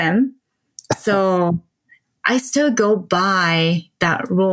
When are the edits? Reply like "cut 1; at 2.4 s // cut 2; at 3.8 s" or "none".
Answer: none